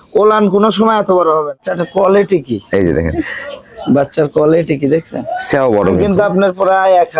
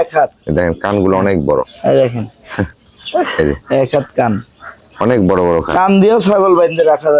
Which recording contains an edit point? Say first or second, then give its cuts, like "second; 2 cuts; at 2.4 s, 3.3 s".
first; 2 cuts; at 1.6 s, 6.0 s